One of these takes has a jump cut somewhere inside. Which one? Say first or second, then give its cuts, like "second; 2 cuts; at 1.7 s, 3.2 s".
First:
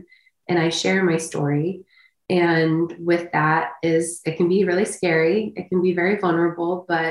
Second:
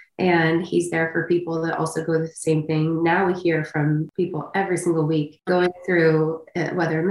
second; 2 cuts; at 4.1 s, 5.4 s